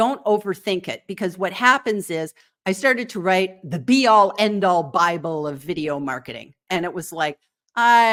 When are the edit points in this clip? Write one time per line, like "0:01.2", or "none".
none